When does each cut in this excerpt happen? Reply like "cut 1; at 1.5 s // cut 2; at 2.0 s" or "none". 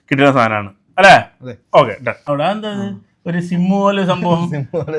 cut 1; at 2.2 s